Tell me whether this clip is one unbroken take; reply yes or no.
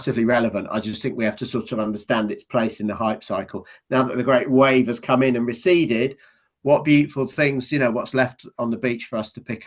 yes